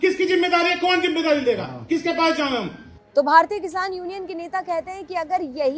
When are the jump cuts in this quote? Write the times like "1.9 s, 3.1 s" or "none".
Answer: none